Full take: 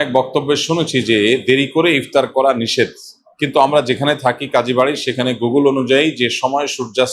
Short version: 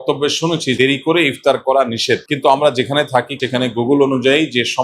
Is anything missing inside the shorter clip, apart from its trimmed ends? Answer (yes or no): yes